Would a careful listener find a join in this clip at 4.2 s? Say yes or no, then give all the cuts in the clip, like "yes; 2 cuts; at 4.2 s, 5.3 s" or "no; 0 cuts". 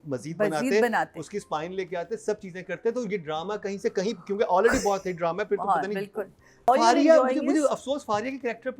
no; 1 cut; at 6.7 s